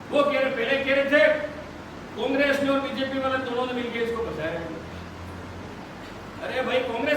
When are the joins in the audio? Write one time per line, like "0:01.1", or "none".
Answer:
none